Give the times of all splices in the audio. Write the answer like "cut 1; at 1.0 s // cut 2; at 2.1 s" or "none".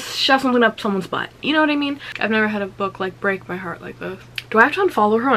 cut 1; at 2.1 s // cut 2; at 4.3 s